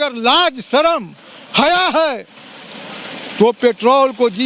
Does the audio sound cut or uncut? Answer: uncut